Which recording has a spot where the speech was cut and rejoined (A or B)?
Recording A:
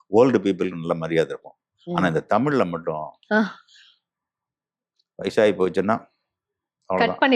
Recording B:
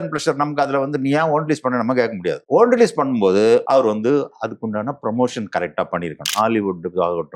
B